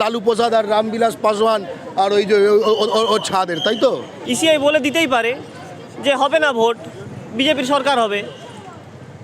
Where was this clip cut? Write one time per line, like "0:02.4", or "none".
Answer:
0:04.1